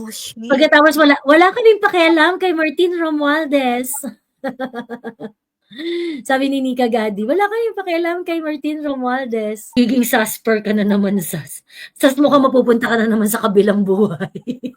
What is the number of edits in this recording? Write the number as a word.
one